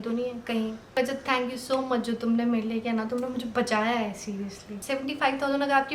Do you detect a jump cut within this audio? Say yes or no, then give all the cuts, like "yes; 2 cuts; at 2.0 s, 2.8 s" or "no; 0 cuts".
yes; 2 cuts; at 1.0 s, 4.8 s